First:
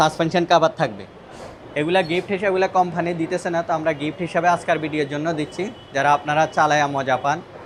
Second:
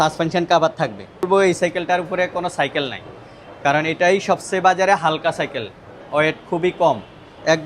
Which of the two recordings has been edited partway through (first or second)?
second